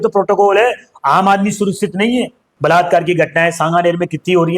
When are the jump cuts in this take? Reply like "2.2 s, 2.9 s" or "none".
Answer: 2.4 s

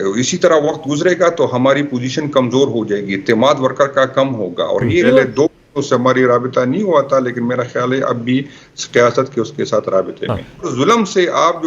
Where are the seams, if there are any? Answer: 5.0 s, 10.6 s

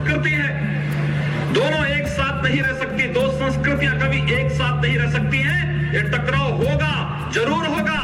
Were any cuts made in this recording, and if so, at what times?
none

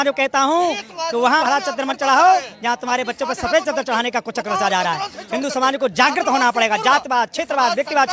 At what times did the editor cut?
1.4 s

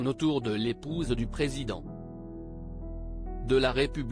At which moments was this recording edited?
1.8 s, 3.3 s

